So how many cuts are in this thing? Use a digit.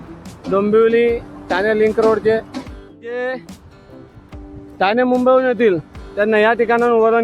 1